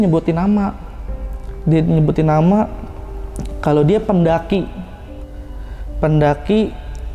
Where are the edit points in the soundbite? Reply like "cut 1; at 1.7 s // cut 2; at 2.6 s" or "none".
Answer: none